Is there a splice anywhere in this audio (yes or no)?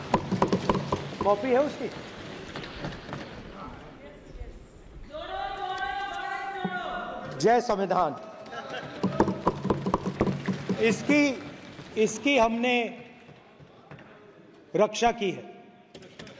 no